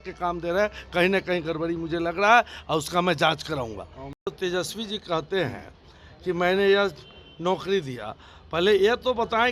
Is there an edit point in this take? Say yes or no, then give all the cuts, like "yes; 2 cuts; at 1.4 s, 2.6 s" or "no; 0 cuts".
yes; 1 cut; at 4.2 s